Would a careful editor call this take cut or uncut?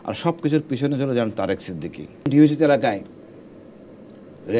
cut